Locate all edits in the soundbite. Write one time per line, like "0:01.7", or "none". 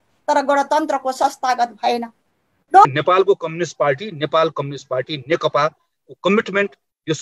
0:02.9